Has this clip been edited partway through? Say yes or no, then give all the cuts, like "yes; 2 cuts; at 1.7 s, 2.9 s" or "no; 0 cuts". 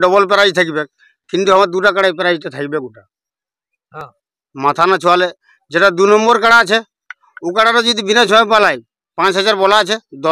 no; 0 cuts